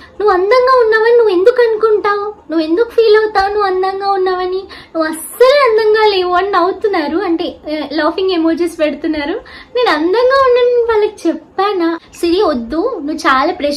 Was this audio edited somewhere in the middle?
yes; 1 cut; at 12.0 s

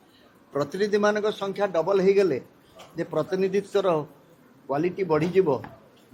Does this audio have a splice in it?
no; 0 cuts

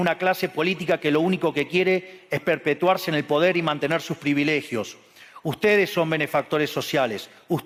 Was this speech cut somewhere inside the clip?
no; 0 cuts

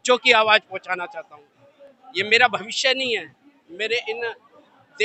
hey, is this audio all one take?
yes; 0 cuts

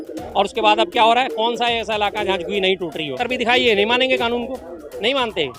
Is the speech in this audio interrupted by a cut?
yes; 1 cut; at 3.2 s

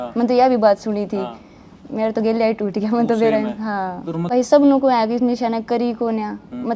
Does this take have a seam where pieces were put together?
yes; 1 cut; at 4.2 s

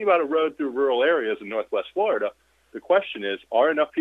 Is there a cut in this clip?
no; 0 cuts

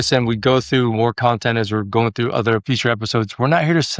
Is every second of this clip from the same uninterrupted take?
yes; 0 cuts

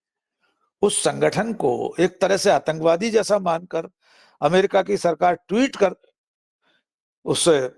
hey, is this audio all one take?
yes; 0 cuts

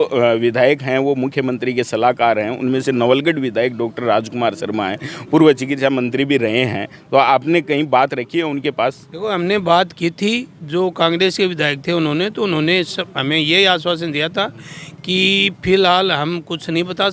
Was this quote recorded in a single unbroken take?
yes; 0 cuts

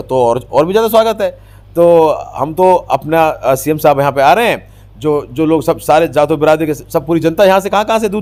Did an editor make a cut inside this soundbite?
no; 0 cuts

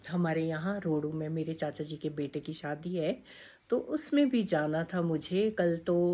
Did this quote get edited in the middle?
no; 0 cuts

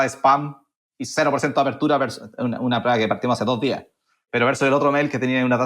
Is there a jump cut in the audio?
no; 0 cuts

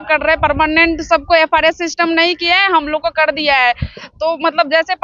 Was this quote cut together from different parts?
no; 0 cuts

